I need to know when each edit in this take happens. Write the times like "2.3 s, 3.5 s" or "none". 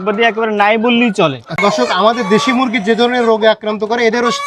1.6 s